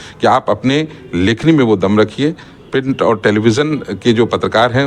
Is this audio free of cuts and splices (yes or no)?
yes